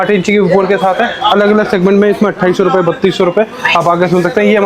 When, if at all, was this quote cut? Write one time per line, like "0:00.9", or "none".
none